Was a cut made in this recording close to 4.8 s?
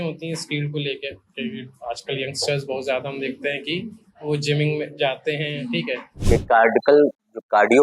no; 1 cut; at 6.3 s

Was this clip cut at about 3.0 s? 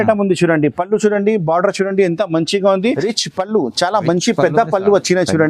yes; 1 cut; at 3.0 s

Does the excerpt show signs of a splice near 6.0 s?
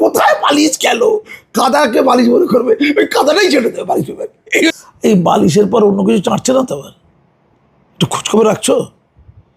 no; 1 cut; at 4.8 s

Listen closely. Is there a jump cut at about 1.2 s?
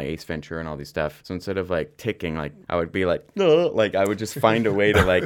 yes; 2 cuts; at 1.2 s, 2.5 s

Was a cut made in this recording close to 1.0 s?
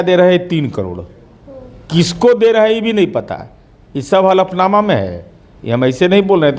no; 0 cuts

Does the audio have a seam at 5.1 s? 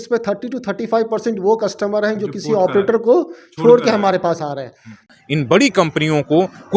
yes; 1 cut; at 5.1 s

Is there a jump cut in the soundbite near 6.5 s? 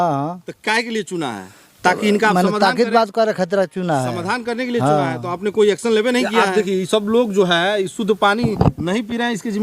yes; 1 cut; at 6.5 s

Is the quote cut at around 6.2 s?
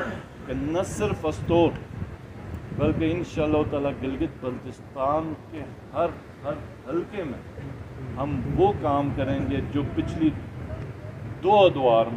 no; 0 cuts

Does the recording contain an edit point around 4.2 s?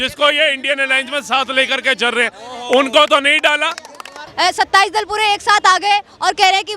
yes; 1 cut; at 4.2 s

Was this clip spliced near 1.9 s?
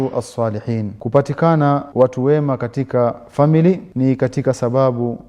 yes; 3 cuts; at 0.9 s, 1.9 s, 3.9 s

